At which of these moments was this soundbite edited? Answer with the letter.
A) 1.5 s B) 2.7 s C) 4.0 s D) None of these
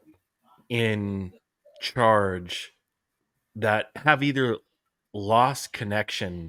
D